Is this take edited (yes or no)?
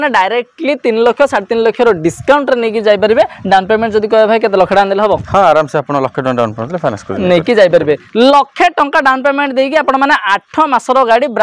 no